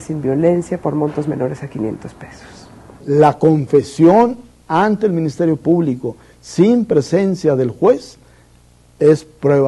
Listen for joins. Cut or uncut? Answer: cut